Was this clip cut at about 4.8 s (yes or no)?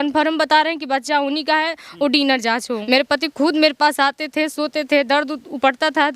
no